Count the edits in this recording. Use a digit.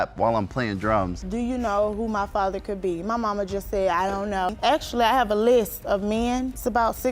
2